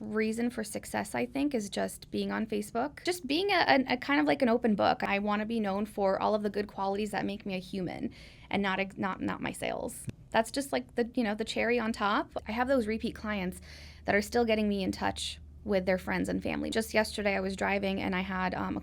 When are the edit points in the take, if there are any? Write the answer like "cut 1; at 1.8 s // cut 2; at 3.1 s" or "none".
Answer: cut 1; at 3.0 s // cut 2; at 5.0 s // cut 3; at 10.0 s // cut 4; at 12.3 s // cut 5; at 16.7 s